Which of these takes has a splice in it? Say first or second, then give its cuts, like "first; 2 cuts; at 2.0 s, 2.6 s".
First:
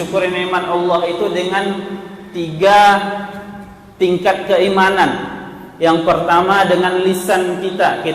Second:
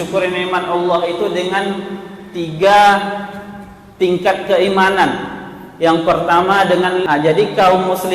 second; 1 cut; at 7.0 s